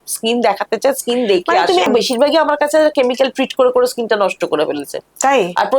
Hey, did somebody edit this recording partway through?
yes; 1 cut; at 1.9 s

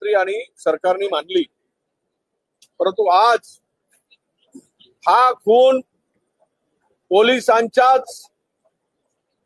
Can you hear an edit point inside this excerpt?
no; 0 cuts

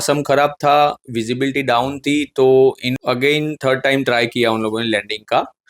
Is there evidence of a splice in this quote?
yes; 1 cut; at 2.9 s

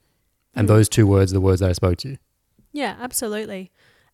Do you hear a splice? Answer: no; 0 cuts

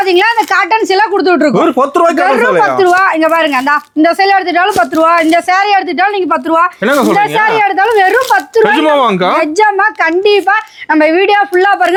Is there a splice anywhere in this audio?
no; 0 cuts

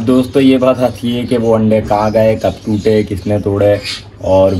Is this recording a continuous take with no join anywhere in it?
yes; 0 cuts

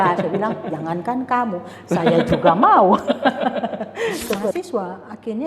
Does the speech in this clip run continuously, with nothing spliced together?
no; 1 cut; at 4.5 s

